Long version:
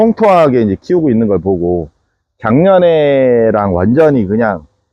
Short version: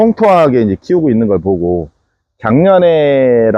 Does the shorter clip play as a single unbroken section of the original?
yes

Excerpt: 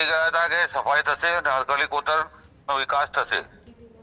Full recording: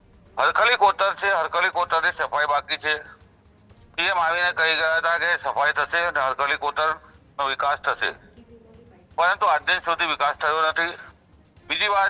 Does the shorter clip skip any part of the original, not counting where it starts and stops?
no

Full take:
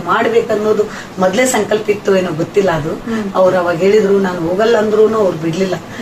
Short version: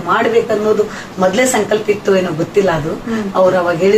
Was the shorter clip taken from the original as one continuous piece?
yes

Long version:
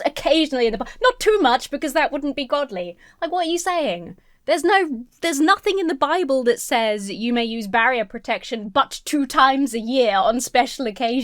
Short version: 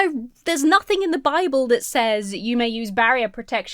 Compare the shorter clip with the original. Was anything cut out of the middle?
no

